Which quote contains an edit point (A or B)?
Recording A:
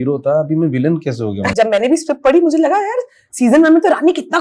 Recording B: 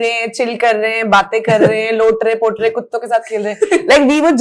A